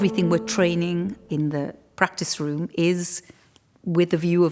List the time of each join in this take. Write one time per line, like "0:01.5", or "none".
0:01.2